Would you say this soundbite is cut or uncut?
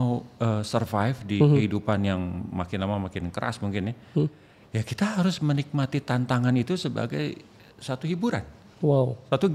uncut